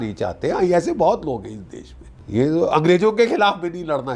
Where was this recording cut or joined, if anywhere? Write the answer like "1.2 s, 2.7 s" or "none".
2.2 s